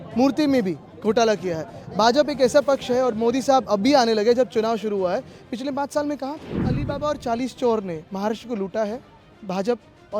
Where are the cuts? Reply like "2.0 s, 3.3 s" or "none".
6.7 s

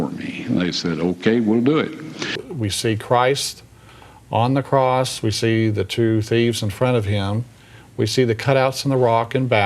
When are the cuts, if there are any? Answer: 2.4 s

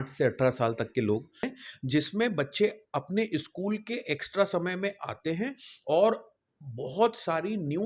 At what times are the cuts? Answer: 1.5 s

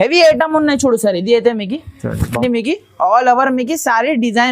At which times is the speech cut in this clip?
2.4 s

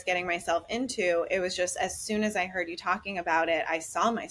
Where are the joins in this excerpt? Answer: none

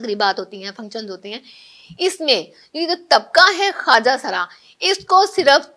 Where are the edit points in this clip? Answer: none

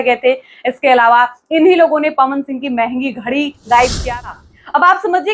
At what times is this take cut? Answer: 4.1 s

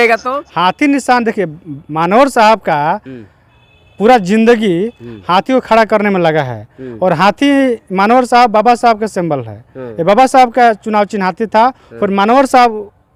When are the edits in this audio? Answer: none

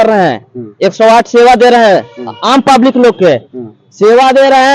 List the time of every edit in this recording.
none

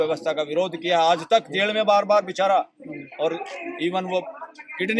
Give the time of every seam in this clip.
none

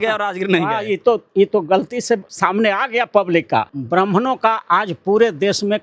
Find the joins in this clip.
2.3 s, 3.7 s

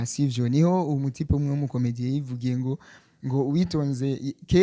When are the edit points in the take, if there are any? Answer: none

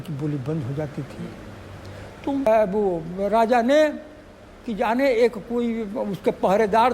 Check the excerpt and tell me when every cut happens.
2.5 s

